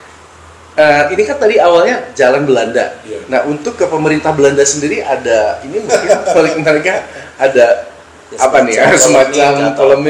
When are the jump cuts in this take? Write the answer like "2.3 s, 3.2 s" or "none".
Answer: none